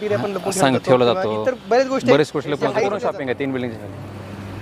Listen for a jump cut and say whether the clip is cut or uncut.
cut